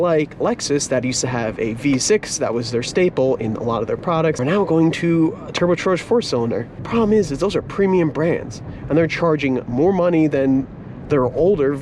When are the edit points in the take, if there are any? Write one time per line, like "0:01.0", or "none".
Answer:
0:04.4
0:06.8